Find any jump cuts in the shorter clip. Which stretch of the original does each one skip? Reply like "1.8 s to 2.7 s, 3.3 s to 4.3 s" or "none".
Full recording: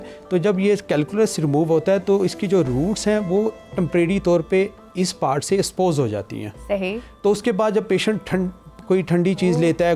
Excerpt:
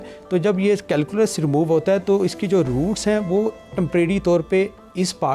none